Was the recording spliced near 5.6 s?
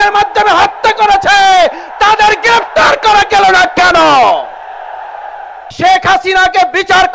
yes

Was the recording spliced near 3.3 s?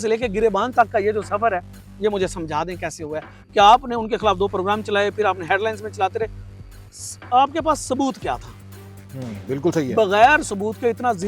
no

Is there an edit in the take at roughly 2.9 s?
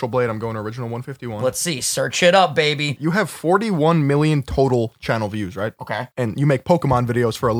yes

